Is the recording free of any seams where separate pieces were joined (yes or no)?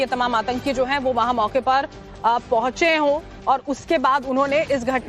no